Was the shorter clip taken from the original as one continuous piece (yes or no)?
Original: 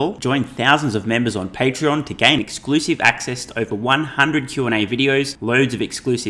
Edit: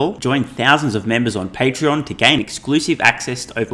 yes